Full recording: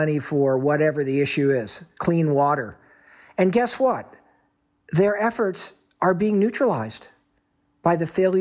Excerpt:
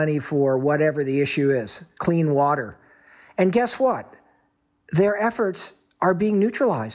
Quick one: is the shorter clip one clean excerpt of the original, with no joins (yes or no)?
yes